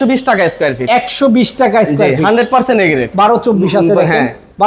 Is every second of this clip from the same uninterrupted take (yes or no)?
no